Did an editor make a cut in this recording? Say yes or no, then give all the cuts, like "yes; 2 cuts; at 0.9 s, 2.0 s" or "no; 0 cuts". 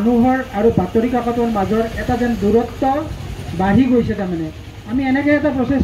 no; 0 cuts